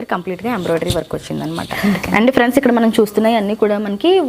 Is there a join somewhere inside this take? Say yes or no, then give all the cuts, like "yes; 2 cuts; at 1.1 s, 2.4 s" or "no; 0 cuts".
yes; 1 cut; at 1.7 s